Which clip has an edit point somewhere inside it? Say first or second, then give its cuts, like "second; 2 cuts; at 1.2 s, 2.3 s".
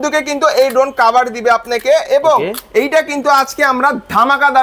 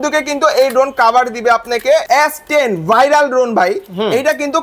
second; 1 cut; at 2.0 s